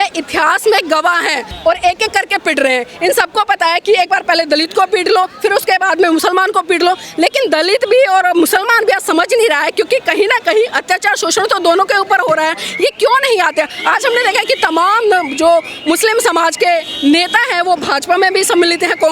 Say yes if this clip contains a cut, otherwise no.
yes